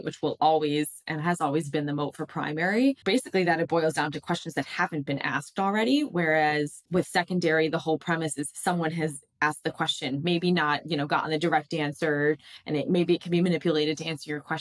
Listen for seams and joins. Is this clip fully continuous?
no; 2 cuts; at 3.0 s, 6.8 s

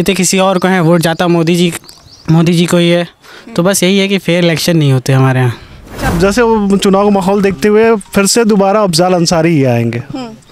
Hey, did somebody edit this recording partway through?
yes; 1 cut; at 6.0 s

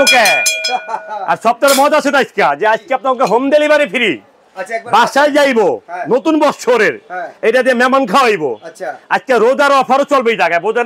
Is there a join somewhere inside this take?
no; 0 cuts

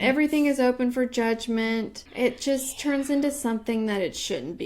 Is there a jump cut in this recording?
yes; 1 cut; at 2.0 s

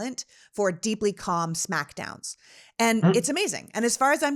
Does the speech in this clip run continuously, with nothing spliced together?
yes; 0 cuts

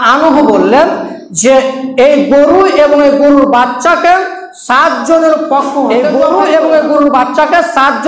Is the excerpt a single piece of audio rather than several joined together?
no; 1 cut; at 6.0 s

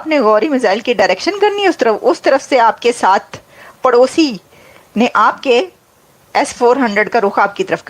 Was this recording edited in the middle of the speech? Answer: no; 0 cuts

